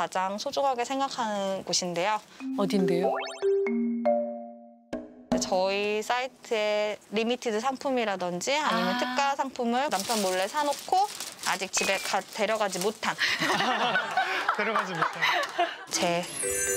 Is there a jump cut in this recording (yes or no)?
no